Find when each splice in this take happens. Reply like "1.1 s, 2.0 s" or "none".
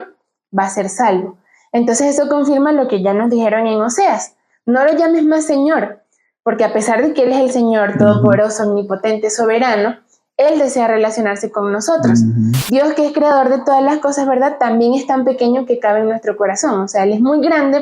12.6 s